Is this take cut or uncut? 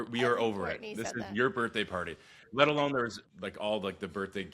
cut